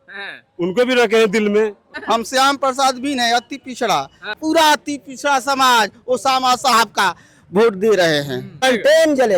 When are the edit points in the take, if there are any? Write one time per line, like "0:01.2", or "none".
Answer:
0:01.9
0:04.3
0:08.6